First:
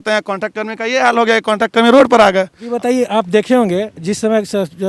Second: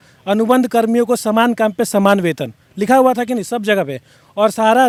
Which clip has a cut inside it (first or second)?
first